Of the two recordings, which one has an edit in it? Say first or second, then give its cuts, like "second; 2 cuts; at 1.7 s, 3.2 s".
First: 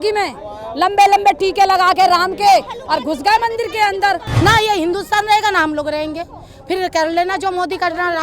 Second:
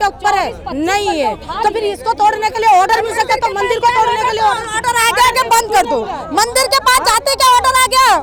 first; 1 cut; at 4.3 s